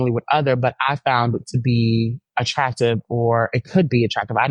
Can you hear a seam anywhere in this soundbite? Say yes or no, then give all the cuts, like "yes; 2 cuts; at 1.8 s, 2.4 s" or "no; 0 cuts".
no; 0 cuts